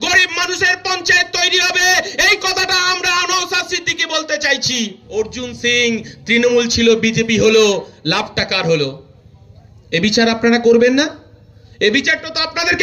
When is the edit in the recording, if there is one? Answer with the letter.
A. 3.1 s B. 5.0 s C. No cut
B